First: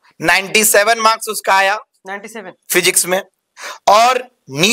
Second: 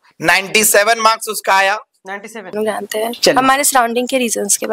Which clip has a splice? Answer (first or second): second